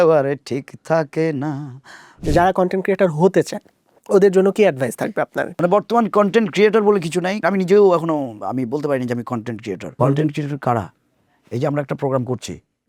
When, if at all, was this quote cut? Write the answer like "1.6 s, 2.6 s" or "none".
2.2 s, 5.4 s, 7.4 s, 10.0 s